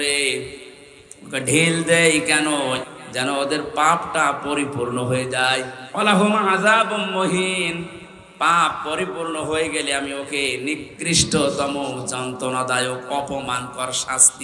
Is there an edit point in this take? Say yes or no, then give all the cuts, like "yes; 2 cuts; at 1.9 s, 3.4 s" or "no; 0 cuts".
yes; 2 cuts; at 2.8 s, 5.8 s